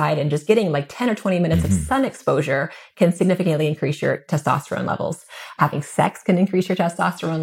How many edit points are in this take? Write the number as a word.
zero